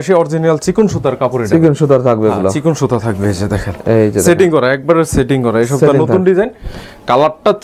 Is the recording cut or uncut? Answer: uncut